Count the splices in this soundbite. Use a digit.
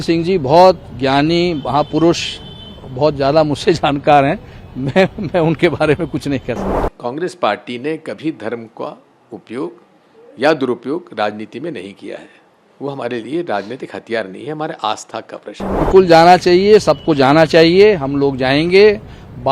2